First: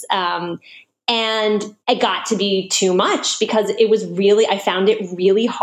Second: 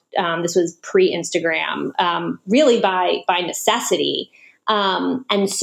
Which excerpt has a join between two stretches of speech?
first; 1 cut; at 1.7 s

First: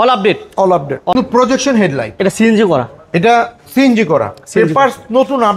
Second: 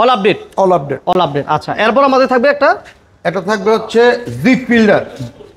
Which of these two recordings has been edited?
first; 1 cut; at 1.1 s

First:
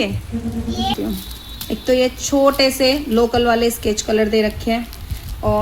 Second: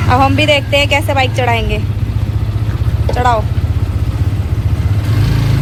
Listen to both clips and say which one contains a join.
first; 1 cut; at 1.0 s

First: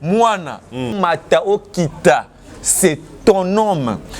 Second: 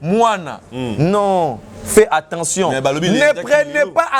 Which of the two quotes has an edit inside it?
first; 1 cut; at 0.9 s

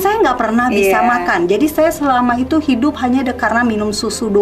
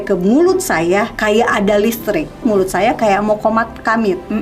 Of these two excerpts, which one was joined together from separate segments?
second; 2 cuts; at 1.1 s, 2.4 s

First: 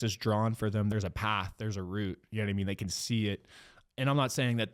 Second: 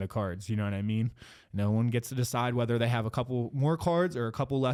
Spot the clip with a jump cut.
first; 2 cuts; at 0.9 s, 3.8 s

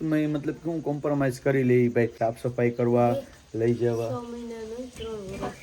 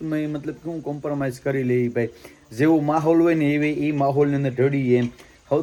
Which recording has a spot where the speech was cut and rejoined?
first; 1 cut; at 2.2 s

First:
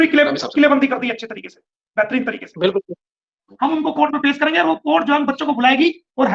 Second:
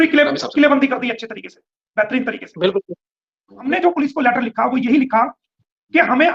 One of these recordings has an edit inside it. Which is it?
first; 1 cut; at 3.4 s

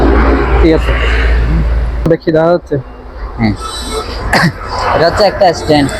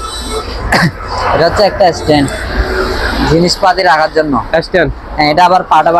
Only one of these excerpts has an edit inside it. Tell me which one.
first; 1 cut; at 2.0 s

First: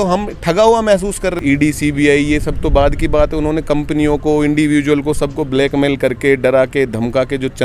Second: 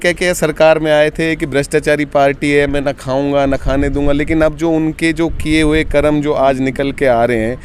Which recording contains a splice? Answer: first; 1 cut; at 1.4 s

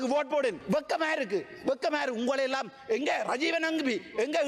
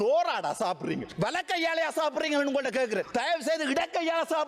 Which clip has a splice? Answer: second; 1 cut; at 1.1 s

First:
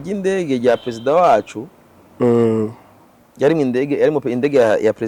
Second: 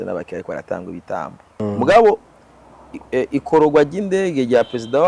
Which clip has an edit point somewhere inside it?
second; 1 cut; at 1.6 s

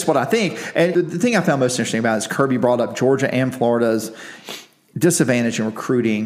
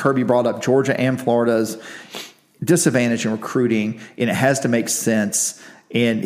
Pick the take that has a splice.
first; 1 cut; at 0.9 s

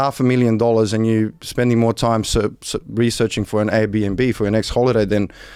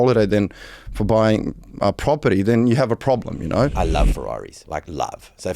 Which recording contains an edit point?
second; 1 cut; at 4.2 s

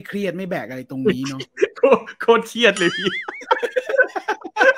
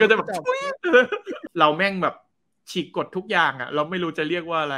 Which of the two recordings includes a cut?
second; 1 cut; at 1.4 s

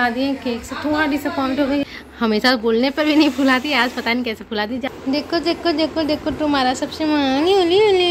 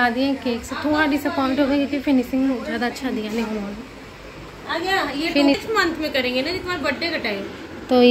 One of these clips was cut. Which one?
first; 2 cuts; at 1.9 s, 4.8 s

